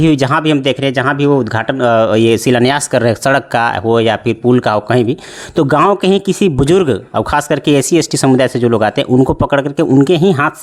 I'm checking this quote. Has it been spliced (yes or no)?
no